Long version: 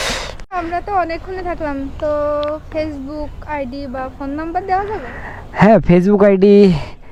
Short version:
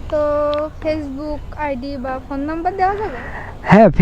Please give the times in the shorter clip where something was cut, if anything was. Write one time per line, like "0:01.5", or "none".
none